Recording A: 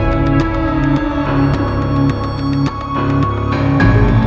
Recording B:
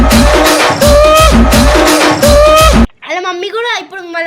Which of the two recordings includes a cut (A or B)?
B